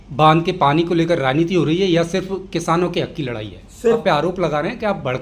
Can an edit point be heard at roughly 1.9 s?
no; 1 cut; at 4.0 s

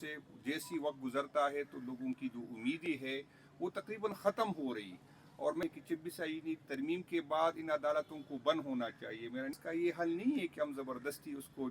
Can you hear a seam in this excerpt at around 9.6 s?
yes; 2 cuts; at 5.6 s, 9.6 s

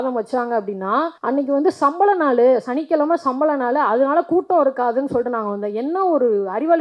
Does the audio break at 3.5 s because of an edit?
no; 1 cut; at 1.2 s

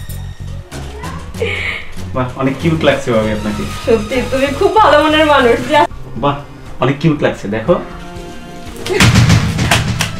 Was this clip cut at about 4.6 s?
no; 1 cut; at 6.0 s

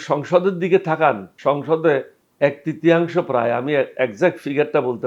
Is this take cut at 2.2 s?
yes; 2 cuts; at 1.3 s, 2.2 s

